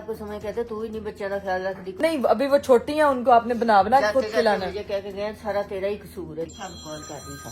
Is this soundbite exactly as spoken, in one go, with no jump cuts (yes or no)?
no